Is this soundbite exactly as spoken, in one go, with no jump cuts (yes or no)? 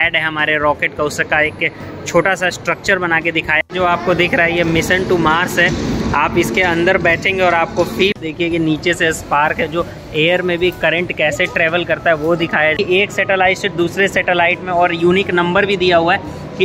no